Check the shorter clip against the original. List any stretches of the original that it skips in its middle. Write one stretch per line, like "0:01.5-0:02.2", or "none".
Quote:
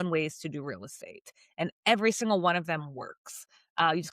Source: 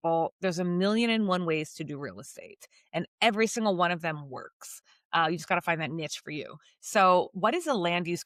none